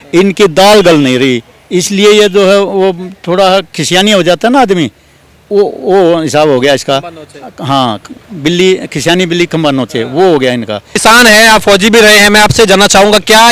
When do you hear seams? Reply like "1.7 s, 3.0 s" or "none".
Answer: 10.8 s